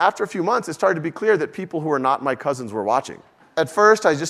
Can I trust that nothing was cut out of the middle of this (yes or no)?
no